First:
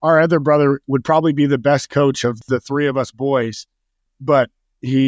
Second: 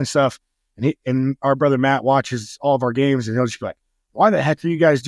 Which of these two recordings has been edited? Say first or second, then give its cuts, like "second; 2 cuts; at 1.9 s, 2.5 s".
first; 3 cuts; at 0.8 s, 2.5 s, 4.0 s